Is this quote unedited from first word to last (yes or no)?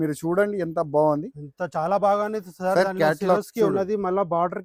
yes